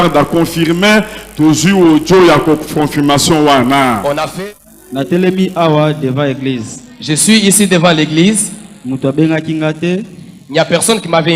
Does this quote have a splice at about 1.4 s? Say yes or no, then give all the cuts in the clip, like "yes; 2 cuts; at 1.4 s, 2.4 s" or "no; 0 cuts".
no; 1 cut; at 4.3 s